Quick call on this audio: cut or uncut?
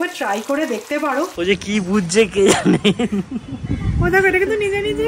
cut